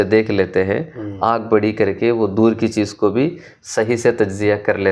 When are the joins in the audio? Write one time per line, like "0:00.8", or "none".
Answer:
none